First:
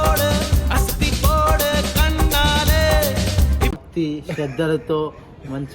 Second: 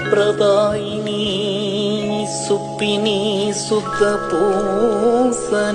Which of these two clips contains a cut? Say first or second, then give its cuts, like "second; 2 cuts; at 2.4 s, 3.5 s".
first; 1 cut; at 3.7 s